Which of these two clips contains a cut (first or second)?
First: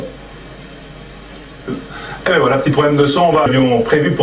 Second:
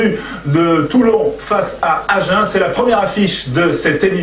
second